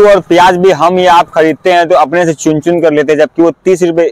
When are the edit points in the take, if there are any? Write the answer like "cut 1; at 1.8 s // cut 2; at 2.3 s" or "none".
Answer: none